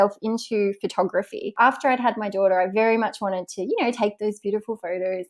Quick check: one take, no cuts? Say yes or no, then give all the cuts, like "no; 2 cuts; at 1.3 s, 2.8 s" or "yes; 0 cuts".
no; 1 cut; at 1.5 s